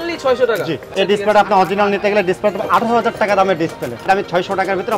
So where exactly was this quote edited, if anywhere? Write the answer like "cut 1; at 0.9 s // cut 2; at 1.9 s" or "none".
cut 1; at 0.9 s // cut 2; at 4.0 s